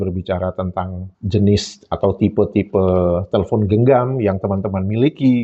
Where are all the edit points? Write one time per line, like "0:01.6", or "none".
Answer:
none